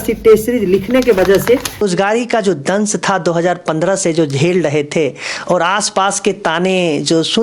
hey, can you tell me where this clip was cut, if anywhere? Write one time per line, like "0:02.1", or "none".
0:01.8